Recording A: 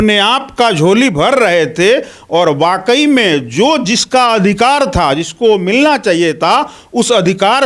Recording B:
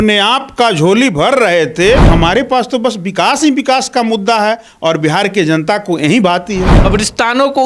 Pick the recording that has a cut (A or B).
B